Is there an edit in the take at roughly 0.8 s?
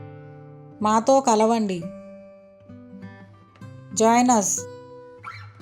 no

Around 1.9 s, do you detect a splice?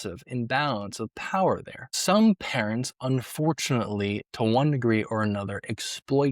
yes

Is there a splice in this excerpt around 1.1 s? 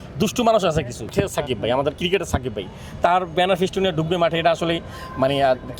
yes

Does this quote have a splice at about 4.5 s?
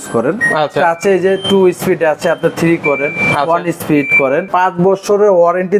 yes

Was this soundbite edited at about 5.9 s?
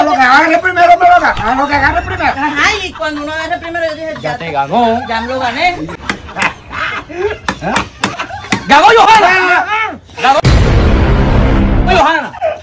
yes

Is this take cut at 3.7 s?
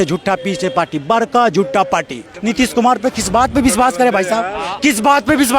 no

